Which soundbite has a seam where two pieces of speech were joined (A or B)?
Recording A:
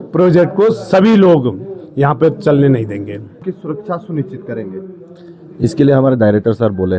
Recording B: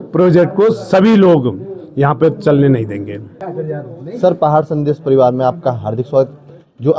A